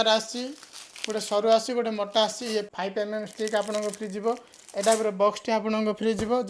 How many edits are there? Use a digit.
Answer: 1